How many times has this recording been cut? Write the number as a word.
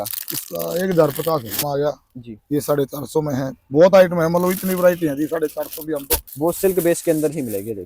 two